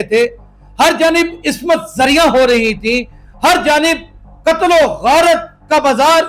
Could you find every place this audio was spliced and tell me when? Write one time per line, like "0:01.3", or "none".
none